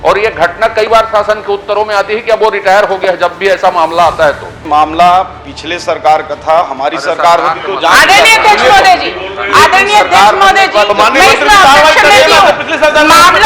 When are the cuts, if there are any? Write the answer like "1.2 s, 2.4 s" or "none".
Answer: 4.6 s